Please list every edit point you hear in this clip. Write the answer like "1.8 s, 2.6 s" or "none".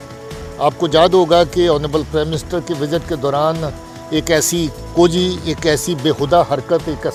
none